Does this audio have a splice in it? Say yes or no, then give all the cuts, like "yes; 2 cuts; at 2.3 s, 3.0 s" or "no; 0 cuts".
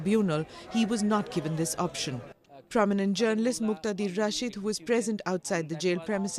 yes; 1 cut; at 4.1 s